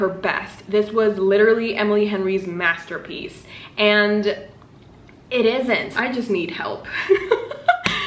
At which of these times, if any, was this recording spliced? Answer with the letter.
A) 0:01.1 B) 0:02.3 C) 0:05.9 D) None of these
C